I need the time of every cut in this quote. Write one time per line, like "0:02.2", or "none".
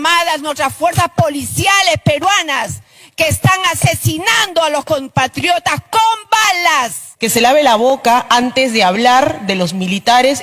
0:07.0